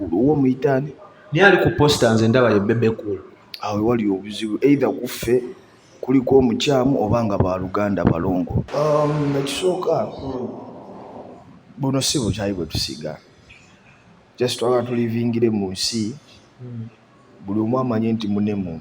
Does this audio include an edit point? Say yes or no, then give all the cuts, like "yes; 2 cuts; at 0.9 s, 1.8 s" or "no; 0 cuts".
yes; 1 cut; at 8.6 s